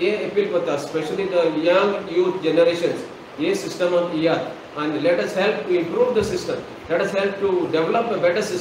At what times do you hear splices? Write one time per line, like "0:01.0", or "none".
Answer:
0:03.2